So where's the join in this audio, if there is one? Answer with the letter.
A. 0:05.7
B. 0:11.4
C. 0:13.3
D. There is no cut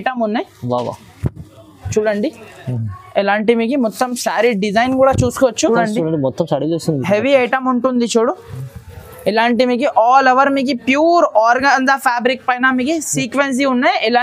A